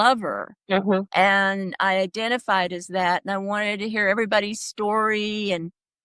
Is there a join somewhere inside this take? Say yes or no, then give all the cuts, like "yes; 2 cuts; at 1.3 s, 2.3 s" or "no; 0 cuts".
no; 0 cuts